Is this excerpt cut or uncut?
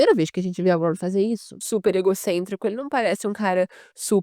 cut